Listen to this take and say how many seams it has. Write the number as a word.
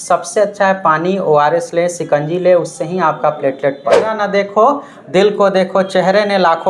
one